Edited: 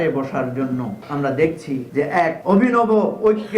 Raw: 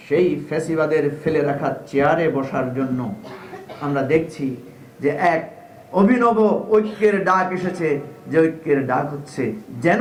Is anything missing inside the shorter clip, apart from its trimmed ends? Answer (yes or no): yes